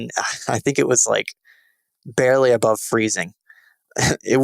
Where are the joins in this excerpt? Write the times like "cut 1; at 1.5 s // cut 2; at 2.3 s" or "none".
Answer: cut 1; at 3.4 s